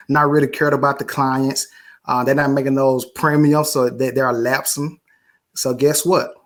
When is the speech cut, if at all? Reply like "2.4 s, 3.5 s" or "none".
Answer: none